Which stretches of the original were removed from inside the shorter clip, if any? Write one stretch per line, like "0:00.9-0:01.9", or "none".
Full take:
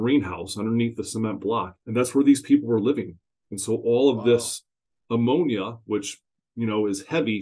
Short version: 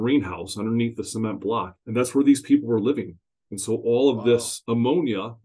0:04.5-0:05.0

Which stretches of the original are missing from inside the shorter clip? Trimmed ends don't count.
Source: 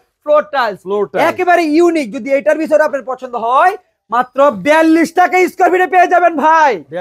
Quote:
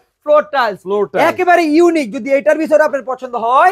none

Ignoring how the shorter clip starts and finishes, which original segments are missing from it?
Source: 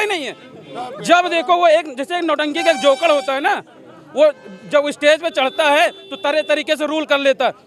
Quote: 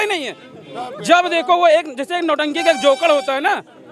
none

